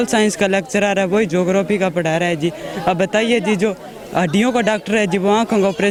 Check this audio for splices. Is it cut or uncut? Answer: uncut